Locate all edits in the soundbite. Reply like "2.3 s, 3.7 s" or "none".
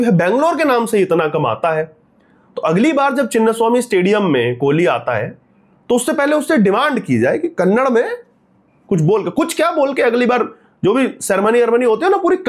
none